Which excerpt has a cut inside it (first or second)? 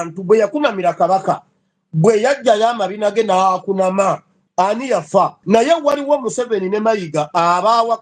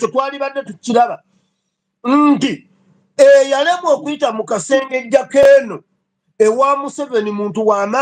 first